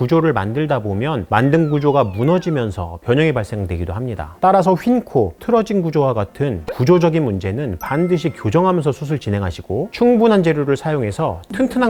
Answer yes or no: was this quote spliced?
no